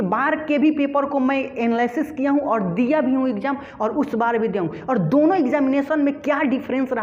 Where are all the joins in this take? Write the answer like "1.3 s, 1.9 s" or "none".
none